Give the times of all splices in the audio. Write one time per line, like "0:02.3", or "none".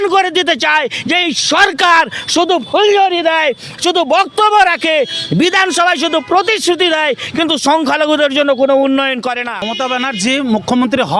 0:09.6